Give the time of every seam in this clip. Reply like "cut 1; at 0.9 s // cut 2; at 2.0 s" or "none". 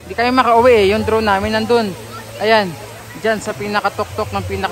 none